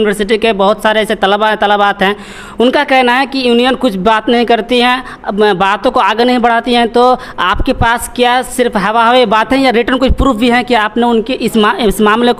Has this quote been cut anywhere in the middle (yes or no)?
no